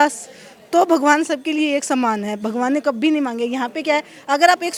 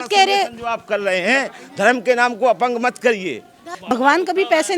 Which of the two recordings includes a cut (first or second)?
second